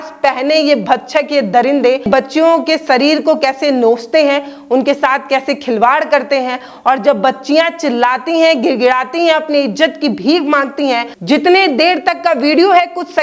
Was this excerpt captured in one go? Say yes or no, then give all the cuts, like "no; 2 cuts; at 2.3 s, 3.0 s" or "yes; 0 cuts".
no; 2 cuts; at 2.1 s, 11.1 s